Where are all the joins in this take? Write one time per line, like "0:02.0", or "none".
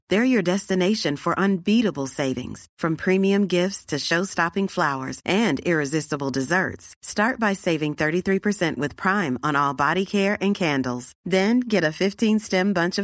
none